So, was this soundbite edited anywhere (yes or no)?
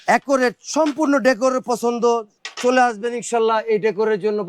no